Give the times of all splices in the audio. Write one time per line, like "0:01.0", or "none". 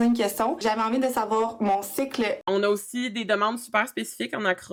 none